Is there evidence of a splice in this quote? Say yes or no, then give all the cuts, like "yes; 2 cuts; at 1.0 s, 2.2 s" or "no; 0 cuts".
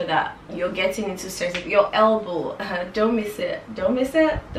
no; 0 cuts